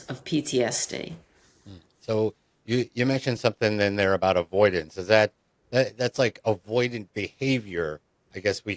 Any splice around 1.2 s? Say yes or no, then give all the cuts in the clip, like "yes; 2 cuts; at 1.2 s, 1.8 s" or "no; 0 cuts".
no; 0 cuts